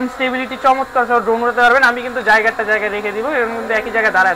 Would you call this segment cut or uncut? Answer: uncut